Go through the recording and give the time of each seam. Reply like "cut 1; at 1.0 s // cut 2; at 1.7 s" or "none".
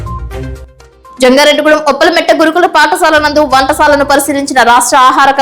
cut 1; at 1.0 s